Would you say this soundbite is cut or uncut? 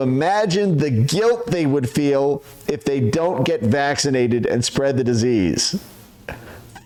uncut